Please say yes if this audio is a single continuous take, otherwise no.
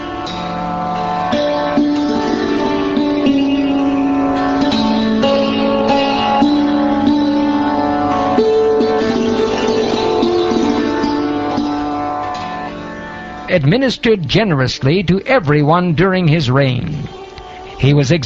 yes